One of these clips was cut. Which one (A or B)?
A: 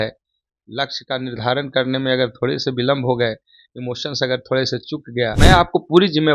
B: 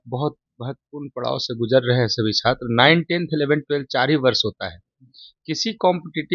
A